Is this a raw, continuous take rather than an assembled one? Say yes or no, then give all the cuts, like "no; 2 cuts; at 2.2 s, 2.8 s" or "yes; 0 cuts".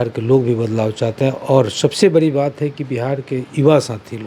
yes; 0 cuts